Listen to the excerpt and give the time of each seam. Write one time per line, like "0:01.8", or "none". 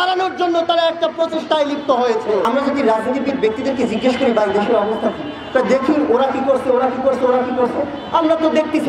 0:02.4